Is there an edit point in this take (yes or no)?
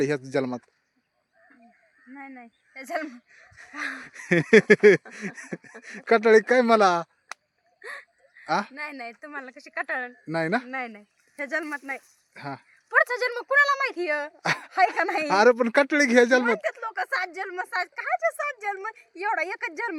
no